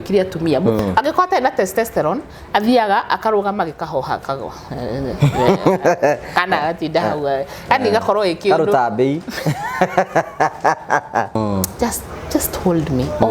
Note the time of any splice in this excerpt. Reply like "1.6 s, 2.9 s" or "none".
0.8 s, 11.4 s